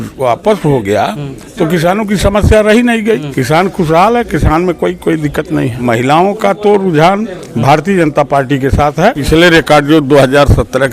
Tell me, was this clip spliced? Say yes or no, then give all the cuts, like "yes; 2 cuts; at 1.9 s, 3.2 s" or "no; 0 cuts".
yes; 3 cuts; at 3.3 s, 5.8 s, 9.2 s